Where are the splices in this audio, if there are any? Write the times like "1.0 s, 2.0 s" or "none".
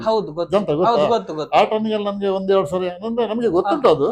none

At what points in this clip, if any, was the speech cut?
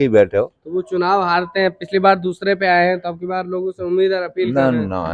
none

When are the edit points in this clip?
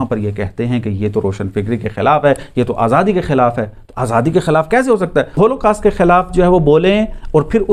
none

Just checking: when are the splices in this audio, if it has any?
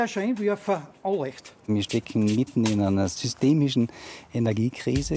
1.7 s, 3.2 s

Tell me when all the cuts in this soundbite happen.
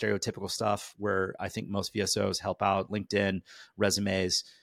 none

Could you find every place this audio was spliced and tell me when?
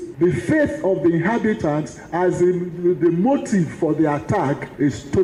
none

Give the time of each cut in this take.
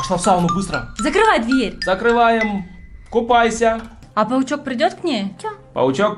3.9 s

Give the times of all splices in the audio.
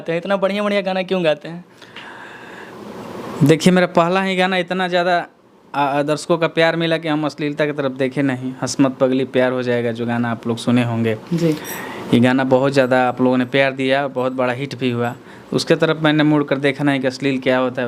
none

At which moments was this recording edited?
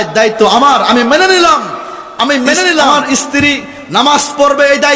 2.9 s

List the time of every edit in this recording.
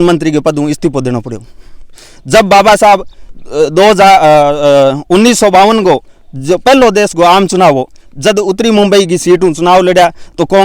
none

